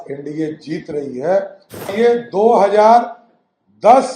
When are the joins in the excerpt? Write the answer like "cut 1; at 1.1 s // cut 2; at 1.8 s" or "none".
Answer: cut 1; at 1.9 s